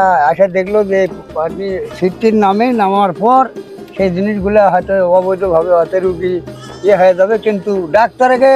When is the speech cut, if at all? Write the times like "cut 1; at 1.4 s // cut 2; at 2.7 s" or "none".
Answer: cut 1; at 1.9 s

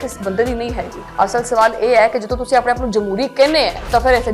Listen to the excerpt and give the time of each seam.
cut 1; at 1.0 s

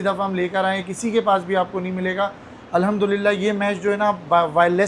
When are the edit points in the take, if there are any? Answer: none

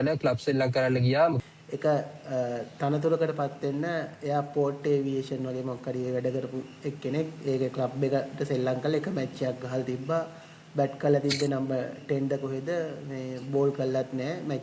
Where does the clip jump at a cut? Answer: cut 1; at 1.4 s

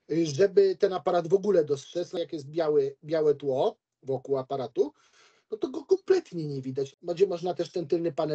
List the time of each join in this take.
cut 1; at 2.2 s // cut 2; at 6.9 s

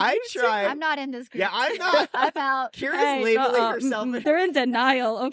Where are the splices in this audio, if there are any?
cut 1; at 4.2 s

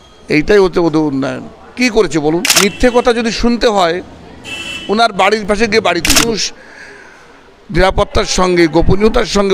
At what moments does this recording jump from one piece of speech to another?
cut 1; at 2.5 s // cut 2; at 6.4 s

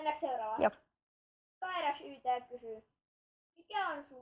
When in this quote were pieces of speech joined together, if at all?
none

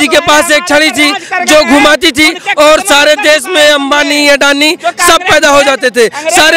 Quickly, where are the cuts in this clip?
none

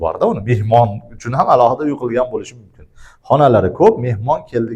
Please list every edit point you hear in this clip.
none

